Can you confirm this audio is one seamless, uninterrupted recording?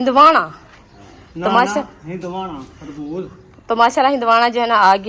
yes; 0 cuts

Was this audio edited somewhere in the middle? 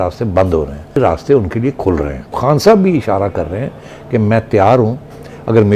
yes; 1 cut; at 2.4 s

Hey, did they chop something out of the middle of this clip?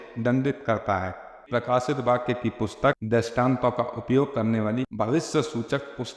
yes; 1 cut; at 1.4 s

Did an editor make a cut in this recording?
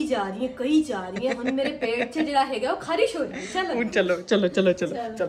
no; 0 cuts

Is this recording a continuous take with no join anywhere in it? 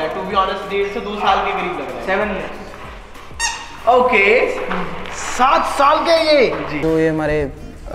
no; 1 cut; at 6.8 s

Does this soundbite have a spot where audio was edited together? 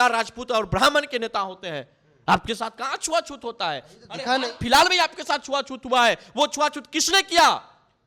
no; 0 cuts

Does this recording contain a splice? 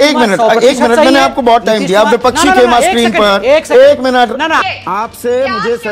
yes; 1 cut; at 4.6 s

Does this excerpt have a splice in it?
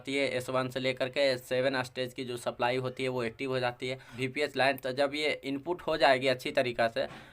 yes; 1 cut; at 4.1 s

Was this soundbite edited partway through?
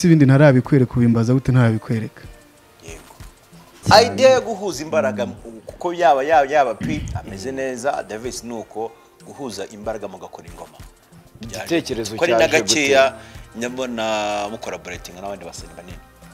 yes; 1 cut; at 3.8 s

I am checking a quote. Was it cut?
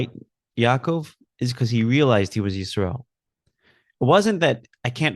no; 0 cuts

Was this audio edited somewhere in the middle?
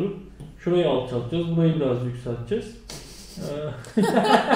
no; 0 cuts

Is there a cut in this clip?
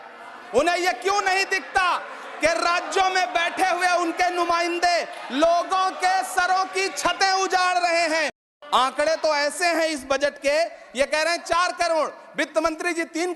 yes; 1 cut; at 8.4 s

